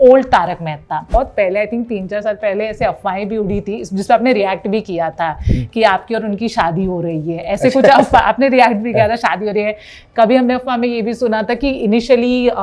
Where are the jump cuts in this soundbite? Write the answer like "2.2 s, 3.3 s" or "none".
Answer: 1.1 s